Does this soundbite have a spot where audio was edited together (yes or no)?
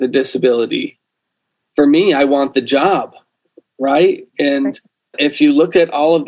yes